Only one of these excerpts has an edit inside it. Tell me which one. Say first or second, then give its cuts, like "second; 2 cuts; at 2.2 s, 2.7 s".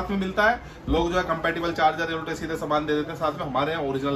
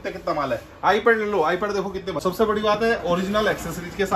second; 1 cut; at 2.2 s